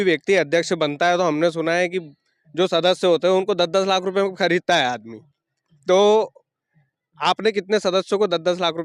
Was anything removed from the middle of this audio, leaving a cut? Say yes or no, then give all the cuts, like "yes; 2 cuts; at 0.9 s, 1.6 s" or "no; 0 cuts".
no; 0 cuts